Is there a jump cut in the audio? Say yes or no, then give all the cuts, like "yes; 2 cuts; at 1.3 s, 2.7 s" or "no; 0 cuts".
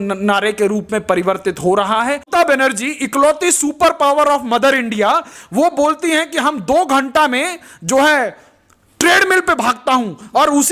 yes; 1 cut; at 2.3 s